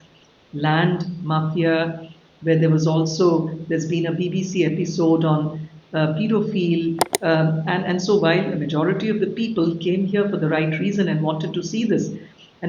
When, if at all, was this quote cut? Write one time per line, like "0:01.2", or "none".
0:07.1